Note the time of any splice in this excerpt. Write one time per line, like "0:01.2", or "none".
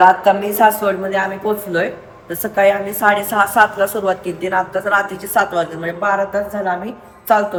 none